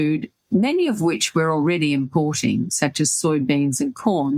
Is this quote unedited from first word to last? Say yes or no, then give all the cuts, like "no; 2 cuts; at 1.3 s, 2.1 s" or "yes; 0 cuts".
yes; 0 cuts